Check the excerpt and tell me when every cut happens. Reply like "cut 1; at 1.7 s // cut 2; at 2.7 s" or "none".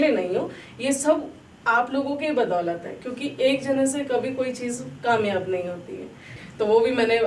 cut 1; at 6.4 s